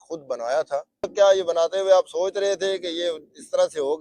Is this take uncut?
no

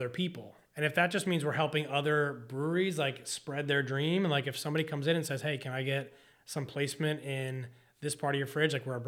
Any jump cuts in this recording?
no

